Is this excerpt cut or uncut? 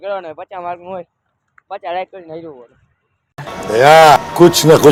uncut